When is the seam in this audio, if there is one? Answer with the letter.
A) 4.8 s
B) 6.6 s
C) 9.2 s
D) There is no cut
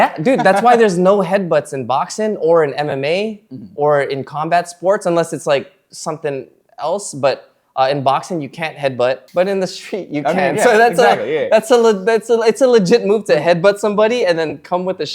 C